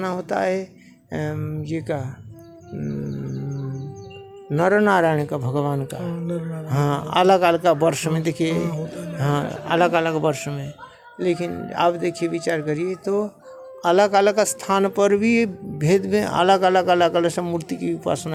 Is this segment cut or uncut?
uncut